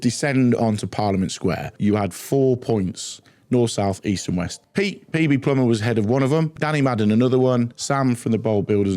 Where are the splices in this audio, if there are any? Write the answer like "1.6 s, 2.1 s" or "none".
1.7 s, 4.6 s, 6.6 s, 7.8 s